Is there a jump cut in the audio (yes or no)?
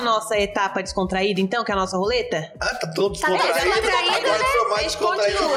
no